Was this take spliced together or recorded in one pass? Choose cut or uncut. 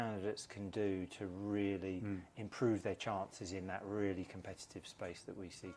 uncut